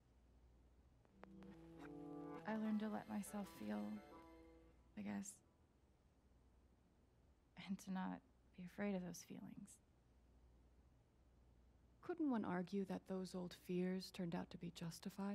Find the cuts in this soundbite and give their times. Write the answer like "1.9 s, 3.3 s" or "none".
1.0 s, 5.5 s, 7.5 s, 10.3 s, 12.0 s